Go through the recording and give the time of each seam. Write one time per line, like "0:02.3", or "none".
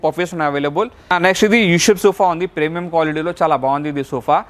0:01.1